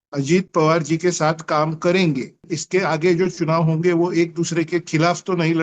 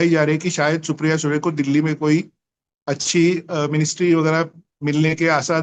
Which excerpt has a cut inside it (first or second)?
first